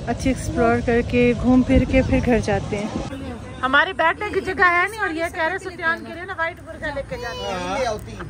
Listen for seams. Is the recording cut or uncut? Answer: cut